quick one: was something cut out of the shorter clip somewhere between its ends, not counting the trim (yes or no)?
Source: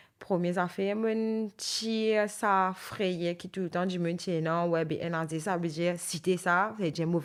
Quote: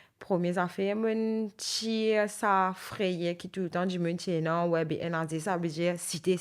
no